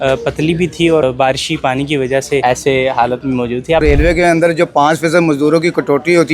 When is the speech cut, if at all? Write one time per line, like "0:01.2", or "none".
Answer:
0:01.0
0:02.4
0:03.8